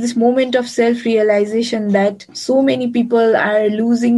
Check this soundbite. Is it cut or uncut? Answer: cut